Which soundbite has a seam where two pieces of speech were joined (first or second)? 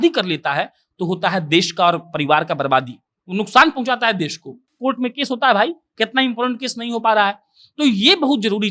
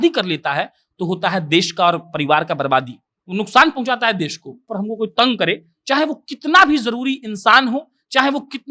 second